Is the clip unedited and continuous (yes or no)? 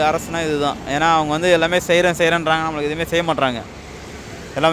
yes